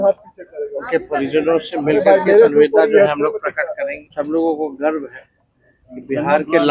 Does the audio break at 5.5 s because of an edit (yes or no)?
no